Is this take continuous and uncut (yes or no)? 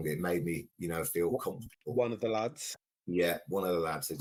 yes